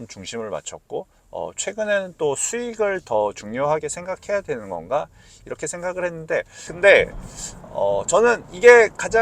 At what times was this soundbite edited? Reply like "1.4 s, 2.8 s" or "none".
6.6 s